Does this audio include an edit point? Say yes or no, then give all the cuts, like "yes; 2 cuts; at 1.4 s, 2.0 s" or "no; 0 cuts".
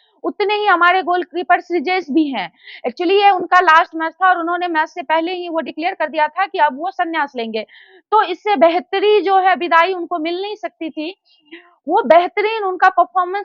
no; 0 cuts